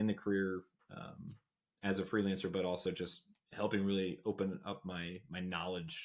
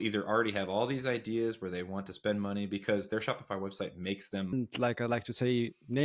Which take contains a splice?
second; 1 cut; at 4.5 s

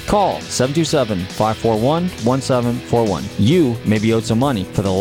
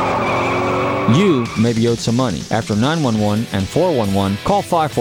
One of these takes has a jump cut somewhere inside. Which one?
second; 1 cut; at 1.0 s

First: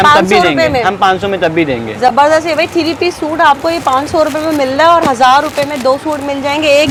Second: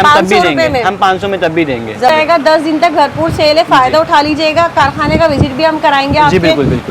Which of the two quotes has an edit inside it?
second; 1 cut; at 2.1 s

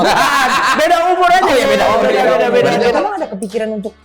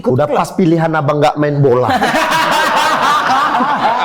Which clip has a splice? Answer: first; 1 cut; at 3.0 s

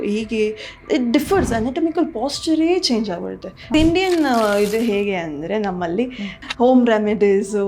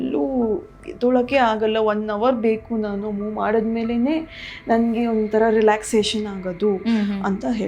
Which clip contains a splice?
first; 2 cuts; at 3.7 s, 6.4 s

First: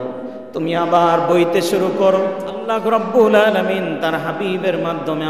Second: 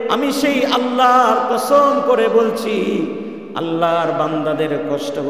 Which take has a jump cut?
first; 1 cut; at 2.7 s

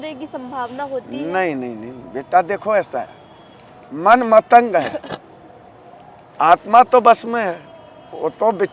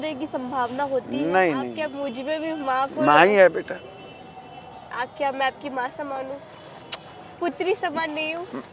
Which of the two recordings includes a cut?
second; 1 cut; at 1.7 s

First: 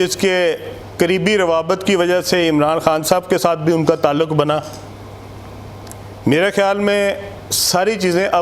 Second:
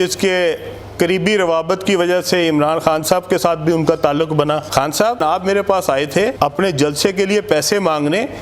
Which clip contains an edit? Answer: second; 2 cuts; at 5.2 s, 6.3 s

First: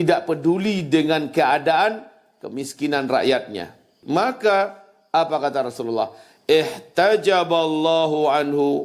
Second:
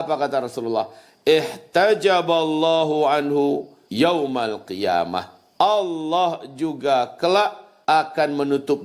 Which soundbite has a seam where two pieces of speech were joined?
first; 1 cut; at 3.9 s

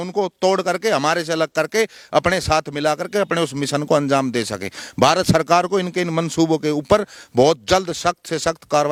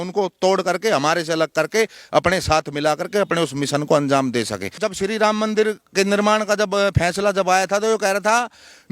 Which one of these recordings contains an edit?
second; 1 cut; at 4.8 s

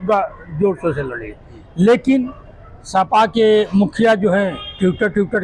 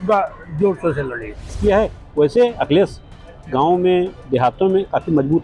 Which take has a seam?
second; 1 cut; at 1.6 s

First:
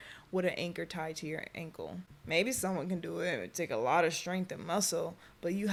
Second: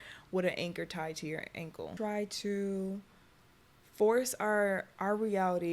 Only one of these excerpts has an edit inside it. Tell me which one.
second; 1 cut; at 1.9 s

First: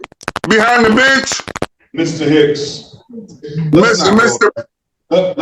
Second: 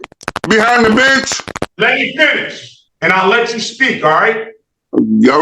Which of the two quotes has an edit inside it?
second; 1 cut; at 1.6 s

